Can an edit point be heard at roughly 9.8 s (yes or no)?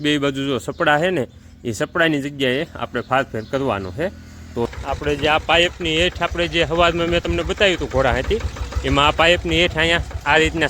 no